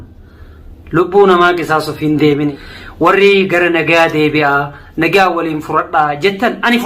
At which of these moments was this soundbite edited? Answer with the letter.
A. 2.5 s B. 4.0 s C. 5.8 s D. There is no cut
A